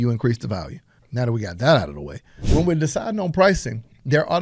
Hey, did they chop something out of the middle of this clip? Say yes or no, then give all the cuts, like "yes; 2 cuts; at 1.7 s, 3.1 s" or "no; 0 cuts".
yes; 2 cuts; at 1.0 s, 2.4 s